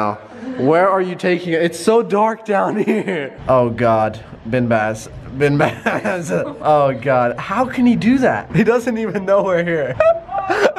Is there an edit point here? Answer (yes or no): yes